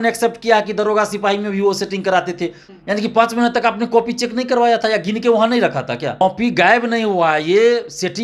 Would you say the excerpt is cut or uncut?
cut